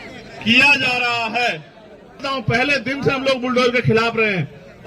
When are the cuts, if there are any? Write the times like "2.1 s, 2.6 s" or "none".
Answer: 2.2 s